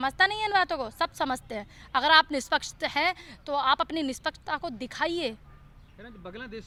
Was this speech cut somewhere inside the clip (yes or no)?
no